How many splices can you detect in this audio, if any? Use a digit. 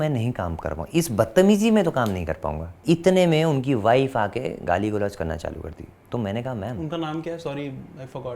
1